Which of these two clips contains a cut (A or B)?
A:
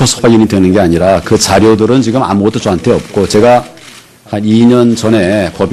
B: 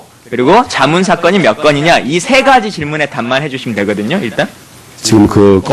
B